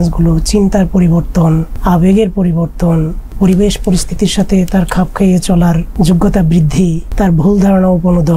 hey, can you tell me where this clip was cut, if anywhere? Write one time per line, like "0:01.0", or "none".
0:01.7
0:03.3
0:05.9